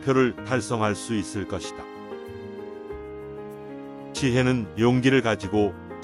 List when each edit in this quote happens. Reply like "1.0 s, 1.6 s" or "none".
none